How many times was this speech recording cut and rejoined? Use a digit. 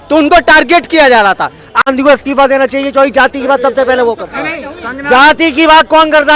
1